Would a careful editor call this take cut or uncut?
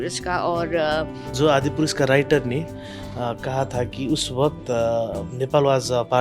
cut